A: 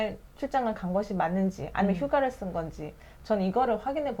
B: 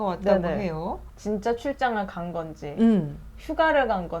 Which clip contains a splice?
B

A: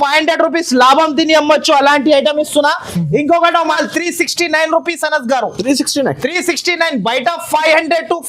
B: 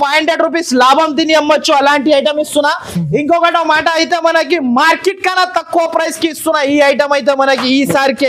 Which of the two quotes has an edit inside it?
A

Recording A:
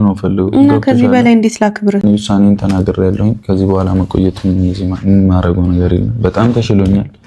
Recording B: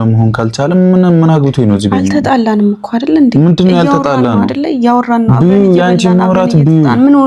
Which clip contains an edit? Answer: A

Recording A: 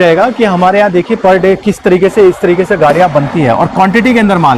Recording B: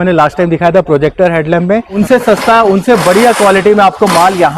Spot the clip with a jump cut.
B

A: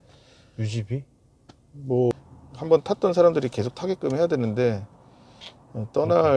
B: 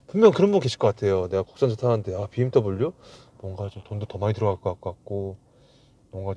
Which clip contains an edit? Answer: A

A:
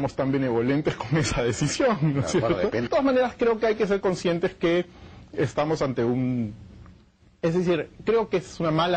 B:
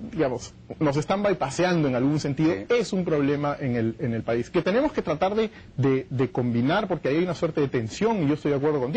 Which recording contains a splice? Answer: A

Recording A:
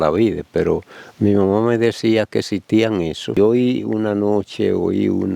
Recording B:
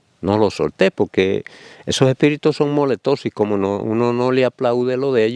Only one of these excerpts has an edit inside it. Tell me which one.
A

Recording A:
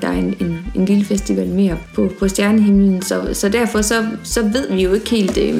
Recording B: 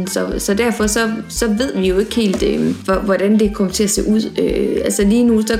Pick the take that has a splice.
A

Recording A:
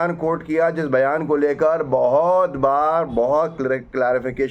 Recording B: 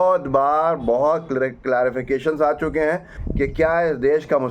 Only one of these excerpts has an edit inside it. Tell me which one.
B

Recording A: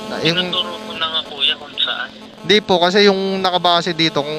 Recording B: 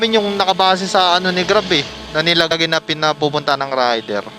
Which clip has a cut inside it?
B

